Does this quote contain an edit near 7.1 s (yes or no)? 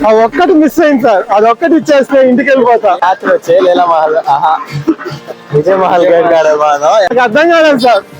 yes